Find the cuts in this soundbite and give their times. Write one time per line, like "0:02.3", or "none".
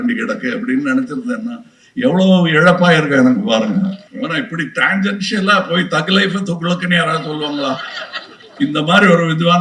0:04.1

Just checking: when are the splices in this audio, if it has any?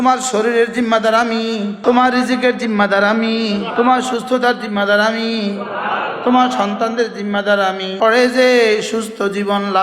0:01.8
0:03.7
0:07.9

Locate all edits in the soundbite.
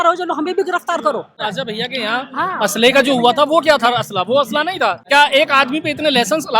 0:01.4
0:05.0

